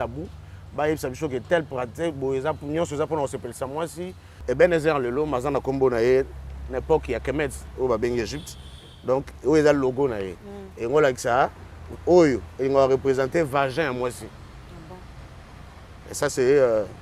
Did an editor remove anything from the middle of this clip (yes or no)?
yes